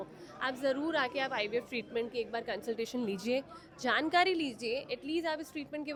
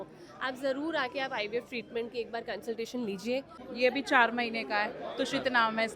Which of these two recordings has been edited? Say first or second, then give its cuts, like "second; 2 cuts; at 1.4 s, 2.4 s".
second; 1 cut; at 3.6 s